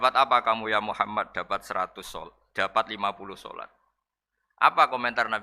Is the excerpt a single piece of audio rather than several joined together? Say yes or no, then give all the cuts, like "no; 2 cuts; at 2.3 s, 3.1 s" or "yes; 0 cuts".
yes; 0 cuts